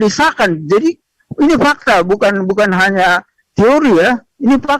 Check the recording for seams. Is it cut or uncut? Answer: uncut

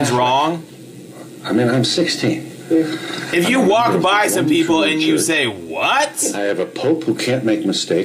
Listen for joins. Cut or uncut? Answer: uncut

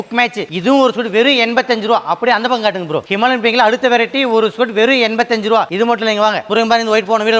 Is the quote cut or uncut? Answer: uncut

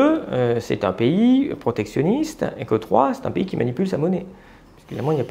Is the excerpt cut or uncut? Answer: uncut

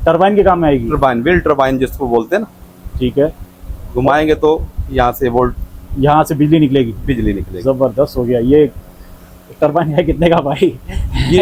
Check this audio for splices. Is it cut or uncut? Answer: uncut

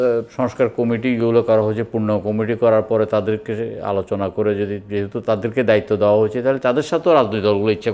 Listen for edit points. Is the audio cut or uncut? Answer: uncut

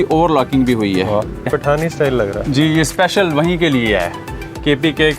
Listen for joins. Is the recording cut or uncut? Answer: cut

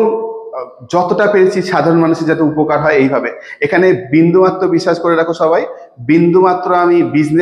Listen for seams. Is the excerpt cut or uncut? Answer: uncut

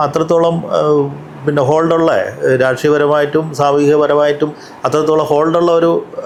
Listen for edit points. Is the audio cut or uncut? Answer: uncut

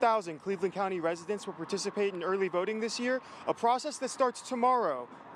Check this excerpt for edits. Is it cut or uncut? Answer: uncut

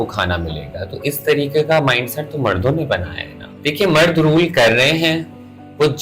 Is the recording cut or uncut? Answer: uncut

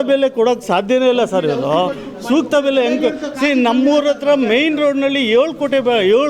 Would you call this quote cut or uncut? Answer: uncut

